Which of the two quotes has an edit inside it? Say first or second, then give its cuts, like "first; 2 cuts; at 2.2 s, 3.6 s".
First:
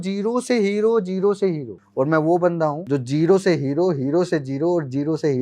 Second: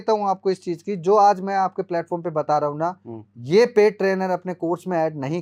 first; 2 cuts; at 1.8 s, 2.8 s